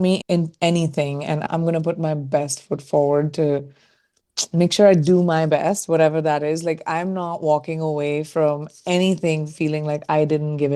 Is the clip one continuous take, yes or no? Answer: yes